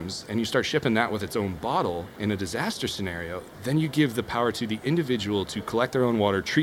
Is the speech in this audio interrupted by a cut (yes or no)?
no